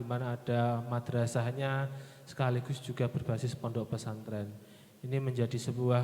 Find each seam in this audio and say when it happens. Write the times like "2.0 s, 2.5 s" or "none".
none